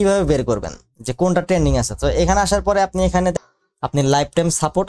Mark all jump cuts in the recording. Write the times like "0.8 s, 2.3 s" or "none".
3.3 s